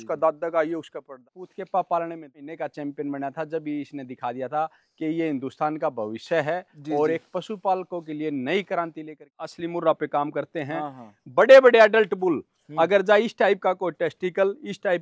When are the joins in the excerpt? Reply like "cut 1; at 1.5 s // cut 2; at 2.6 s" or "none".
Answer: cut 1; at 1.2 s // cut 2; at 2.5 s // cut 3; at 9.2 s